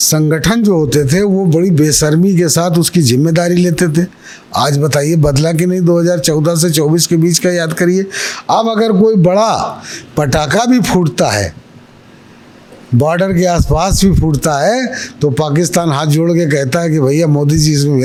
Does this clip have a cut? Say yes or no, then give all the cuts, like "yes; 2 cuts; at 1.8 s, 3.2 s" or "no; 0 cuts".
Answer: no; 0 cuts